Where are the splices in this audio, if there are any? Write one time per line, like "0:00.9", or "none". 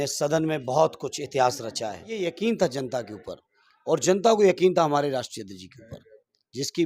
0:02.1

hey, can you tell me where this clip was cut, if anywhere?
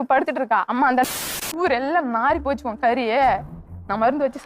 0:01.3

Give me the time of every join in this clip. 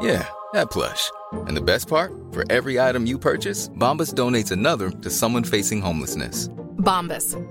none

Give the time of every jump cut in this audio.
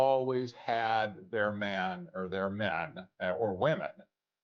none

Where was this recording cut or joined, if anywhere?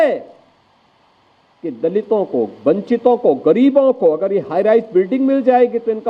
none

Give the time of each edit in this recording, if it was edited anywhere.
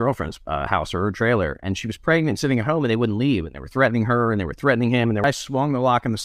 0:05.2

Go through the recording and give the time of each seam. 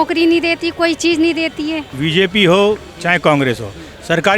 0:01.9

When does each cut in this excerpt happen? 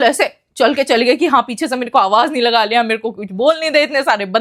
none

